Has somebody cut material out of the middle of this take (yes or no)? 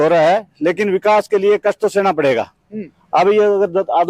no